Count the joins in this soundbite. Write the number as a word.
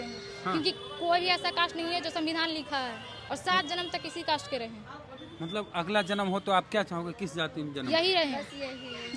one